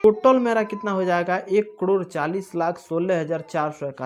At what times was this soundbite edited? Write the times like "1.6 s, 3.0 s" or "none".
none